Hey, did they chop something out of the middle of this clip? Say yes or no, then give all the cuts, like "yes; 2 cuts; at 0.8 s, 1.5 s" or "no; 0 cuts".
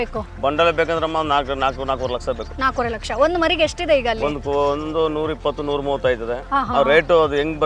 no; 0 cuts